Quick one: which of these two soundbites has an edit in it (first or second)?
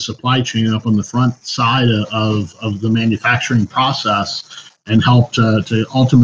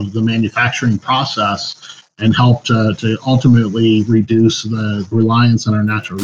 second